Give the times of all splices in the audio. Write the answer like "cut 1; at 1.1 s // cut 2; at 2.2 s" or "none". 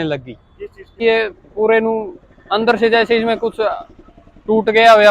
cut 1; at 1.0 s